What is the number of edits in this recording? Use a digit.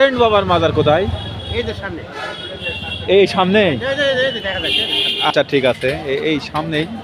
0